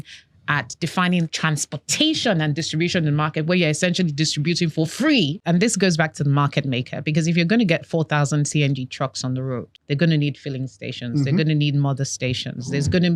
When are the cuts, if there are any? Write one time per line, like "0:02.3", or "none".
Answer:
0:05.4
0:09.7